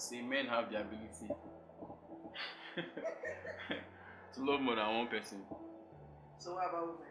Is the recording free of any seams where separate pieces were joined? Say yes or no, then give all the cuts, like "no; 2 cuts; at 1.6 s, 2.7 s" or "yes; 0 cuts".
yes; 0 cuts